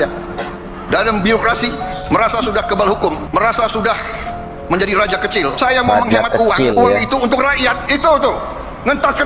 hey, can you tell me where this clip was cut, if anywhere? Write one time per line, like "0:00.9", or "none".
none